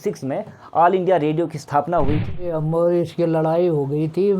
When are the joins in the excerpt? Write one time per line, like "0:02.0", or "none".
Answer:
0:02.5